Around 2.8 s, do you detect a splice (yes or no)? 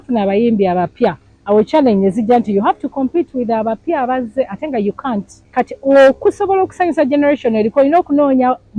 no